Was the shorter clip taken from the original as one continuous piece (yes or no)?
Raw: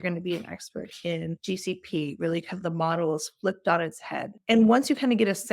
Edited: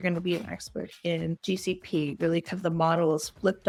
yes